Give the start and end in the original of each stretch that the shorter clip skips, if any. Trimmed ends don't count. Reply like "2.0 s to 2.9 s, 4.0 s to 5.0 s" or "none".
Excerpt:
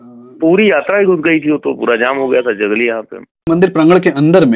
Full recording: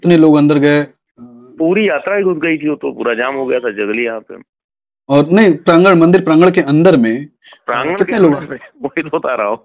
4.7 s to 6.0 s